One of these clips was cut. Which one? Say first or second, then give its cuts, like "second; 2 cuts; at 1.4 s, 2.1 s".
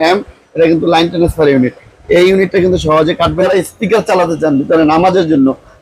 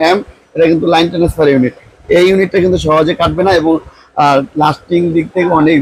first; 1 cut; at 3.5 s